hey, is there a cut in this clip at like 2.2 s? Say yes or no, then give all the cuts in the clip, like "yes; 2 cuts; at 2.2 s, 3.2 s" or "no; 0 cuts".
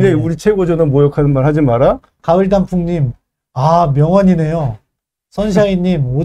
yes; 1 cut; at 2.2 s